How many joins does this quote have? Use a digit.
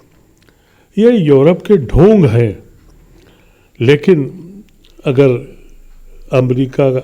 0